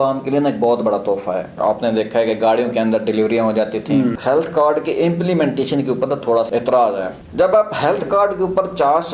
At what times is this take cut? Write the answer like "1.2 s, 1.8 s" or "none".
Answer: 1.5 s, 4.1 s, 6.5 s, 7.2 s

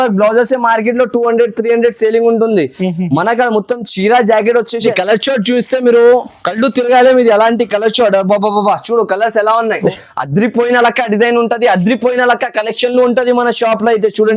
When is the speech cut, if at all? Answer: 4.9 s, 9.9 s

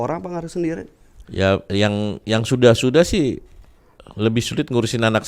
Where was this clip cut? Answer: none

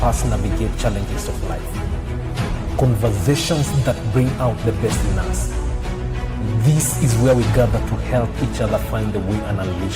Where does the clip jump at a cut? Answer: none

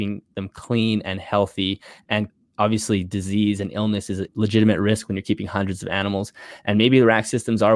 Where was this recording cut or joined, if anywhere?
2.4 s, 4.3 s

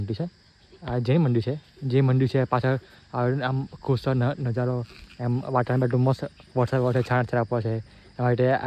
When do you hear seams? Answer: none

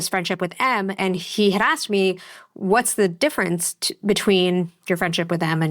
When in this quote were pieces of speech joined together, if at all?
1.0 s

